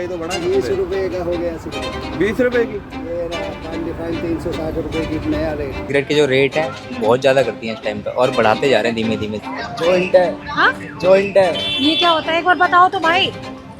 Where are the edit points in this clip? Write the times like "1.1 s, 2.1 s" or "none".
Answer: 5.8 s, 9.3 s